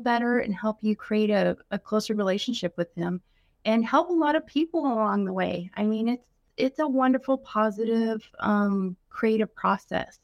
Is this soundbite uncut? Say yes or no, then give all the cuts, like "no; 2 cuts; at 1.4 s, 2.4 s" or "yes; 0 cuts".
no; 1 cut; at 6.5 s